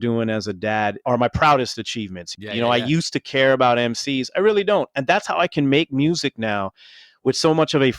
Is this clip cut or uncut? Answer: cut